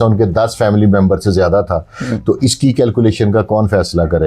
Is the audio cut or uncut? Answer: uncut